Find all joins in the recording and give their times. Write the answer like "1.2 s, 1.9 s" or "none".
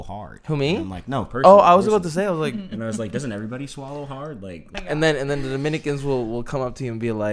4.7 s